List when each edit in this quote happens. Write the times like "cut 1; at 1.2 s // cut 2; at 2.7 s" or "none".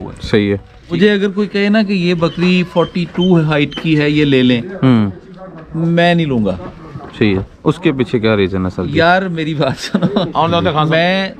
cut 1; at 0.9 s